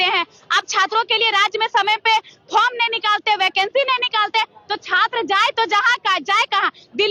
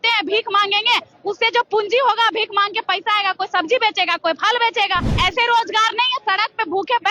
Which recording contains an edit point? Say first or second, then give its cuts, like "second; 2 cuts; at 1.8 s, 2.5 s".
second; 1 cut; at 5.1 s